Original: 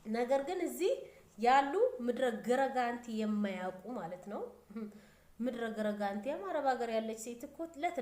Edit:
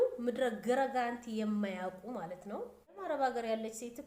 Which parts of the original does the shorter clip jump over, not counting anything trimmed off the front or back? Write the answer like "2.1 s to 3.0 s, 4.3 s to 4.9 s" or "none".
4.8 s to 6.4 s